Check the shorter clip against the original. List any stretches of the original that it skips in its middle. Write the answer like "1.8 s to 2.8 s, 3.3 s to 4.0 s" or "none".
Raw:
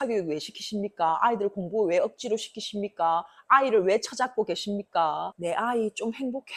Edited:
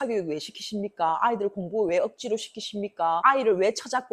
3.2 s to 3.5 s